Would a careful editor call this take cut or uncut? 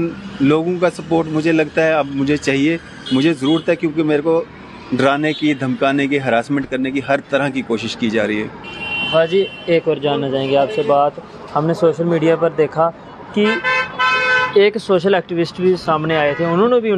uncut